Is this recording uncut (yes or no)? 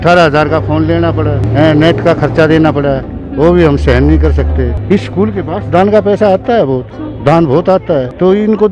no